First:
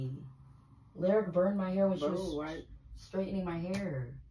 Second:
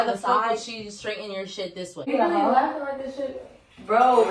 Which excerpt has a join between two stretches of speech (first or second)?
second